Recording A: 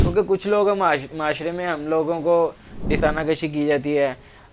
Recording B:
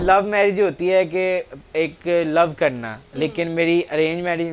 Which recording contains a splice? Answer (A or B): A